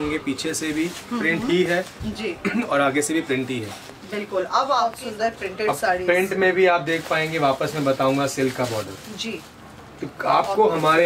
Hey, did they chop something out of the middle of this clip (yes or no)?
yes